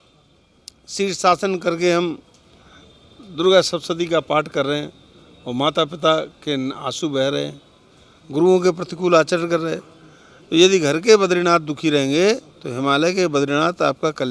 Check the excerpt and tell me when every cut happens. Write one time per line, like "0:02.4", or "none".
none

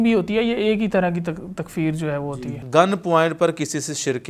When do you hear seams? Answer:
0:02.4

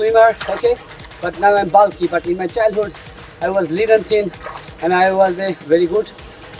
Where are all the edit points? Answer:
none

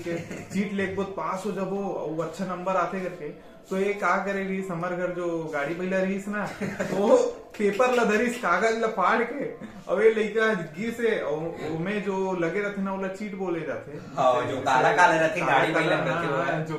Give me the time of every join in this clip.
none

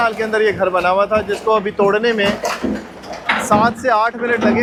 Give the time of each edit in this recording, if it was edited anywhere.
none

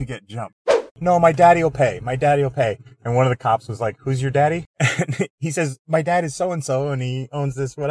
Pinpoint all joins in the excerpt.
0:00.9
0:04.7

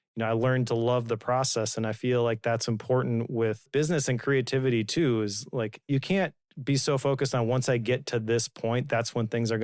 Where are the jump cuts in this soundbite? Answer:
0:03.6
0:05.9

